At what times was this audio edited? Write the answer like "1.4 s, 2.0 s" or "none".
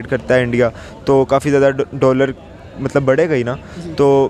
none